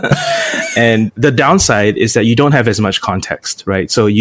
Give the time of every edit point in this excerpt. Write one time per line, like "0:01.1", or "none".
0:01.1